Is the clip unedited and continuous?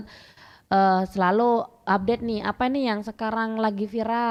yes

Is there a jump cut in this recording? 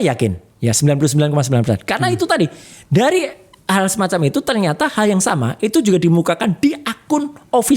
no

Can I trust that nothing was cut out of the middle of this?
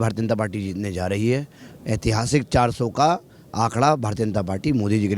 yes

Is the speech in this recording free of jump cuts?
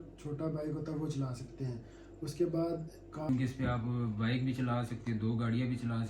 no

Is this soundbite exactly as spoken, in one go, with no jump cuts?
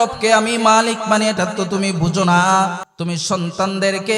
no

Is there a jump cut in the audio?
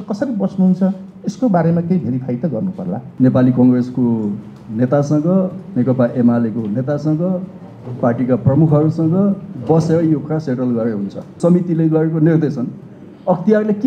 yes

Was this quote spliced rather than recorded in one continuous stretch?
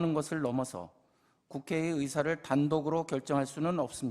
no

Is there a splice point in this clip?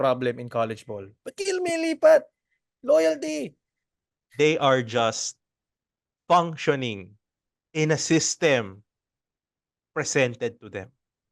no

